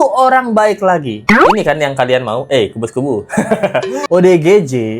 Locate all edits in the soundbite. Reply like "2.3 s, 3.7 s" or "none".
4.0 s